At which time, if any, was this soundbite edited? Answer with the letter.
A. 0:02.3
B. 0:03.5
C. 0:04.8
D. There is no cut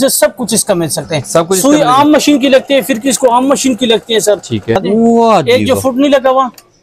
C